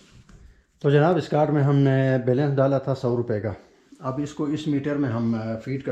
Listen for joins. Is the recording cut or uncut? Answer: uncut